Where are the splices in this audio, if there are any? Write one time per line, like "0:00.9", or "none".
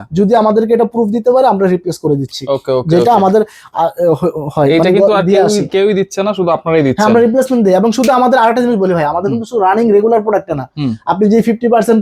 none